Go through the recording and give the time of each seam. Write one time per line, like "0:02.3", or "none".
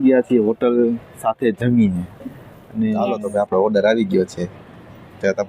0:03.0